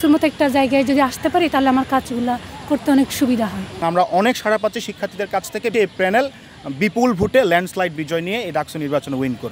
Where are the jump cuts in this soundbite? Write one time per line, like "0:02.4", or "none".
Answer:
0:03.8
0:05.7